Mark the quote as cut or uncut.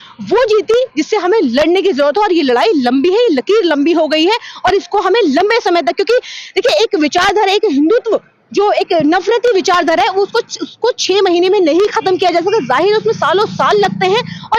uncut